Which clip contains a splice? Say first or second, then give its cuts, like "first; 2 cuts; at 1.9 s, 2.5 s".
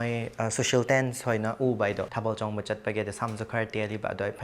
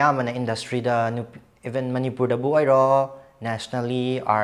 first; 1 cut; at 2.1 s